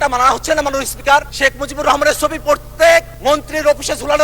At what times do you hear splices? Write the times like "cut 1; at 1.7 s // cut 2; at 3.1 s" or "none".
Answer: cut 1; at 1.3 s // cut 2; at 3.1 s